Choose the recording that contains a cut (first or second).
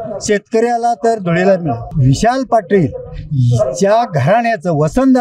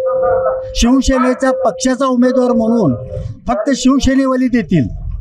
first